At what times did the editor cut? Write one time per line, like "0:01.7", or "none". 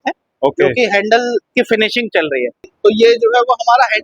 0:01.5
0:02.7